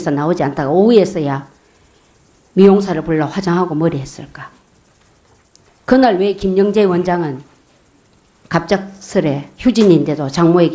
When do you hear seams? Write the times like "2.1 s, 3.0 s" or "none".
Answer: 9.0 s